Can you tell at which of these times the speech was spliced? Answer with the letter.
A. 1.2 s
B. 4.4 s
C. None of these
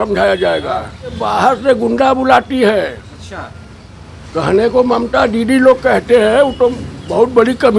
A